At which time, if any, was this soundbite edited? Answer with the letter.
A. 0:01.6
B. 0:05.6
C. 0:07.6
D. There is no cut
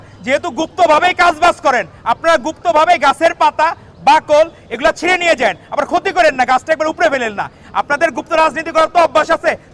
D